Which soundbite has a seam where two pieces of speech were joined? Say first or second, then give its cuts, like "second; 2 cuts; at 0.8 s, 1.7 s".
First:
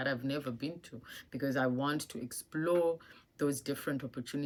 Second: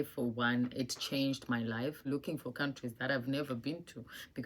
second; 1 cut; at 2.1 s